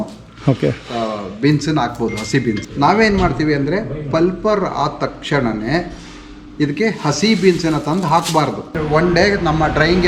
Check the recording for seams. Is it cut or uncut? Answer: cut